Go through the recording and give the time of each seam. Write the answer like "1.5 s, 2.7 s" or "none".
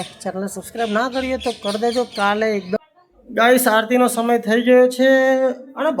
2.8 s